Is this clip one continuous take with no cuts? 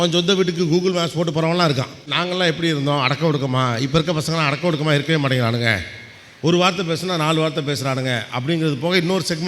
no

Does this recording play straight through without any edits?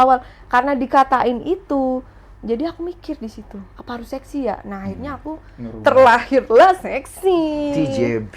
yes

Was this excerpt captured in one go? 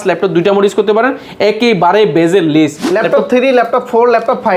no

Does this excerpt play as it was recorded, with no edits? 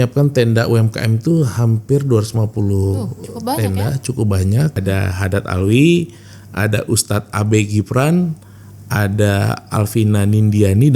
no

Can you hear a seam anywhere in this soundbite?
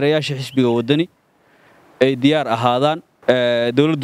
yes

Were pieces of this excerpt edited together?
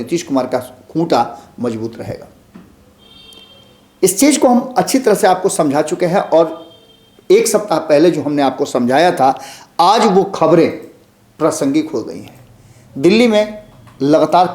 no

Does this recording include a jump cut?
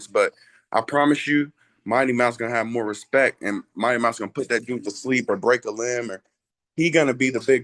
no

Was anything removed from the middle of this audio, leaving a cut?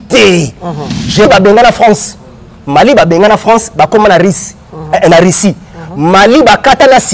yes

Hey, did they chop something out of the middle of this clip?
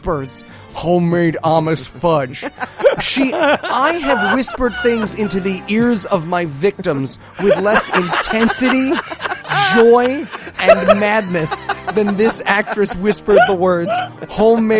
no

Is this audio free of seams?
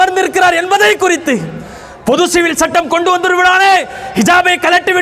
yes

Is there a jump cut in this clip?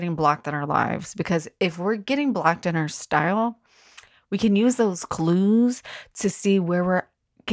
no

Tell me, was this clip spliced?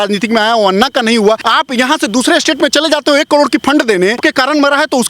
yes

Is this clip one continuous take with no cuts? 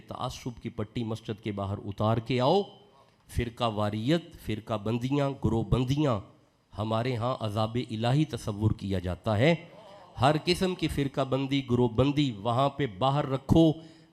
yes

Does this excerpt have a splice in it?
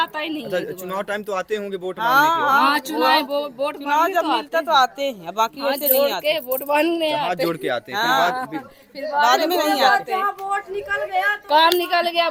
no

